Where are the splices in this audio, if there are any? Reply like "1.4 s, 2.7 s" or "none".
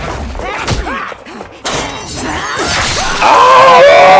none